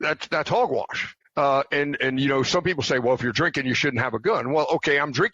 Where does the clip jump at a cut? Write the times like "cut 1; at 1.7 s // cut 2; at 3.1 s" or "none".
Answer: cut 1; at 1.1 s